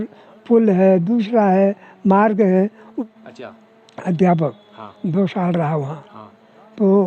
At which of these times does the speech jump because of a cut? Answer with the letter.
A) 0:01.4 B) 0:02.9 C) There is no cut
B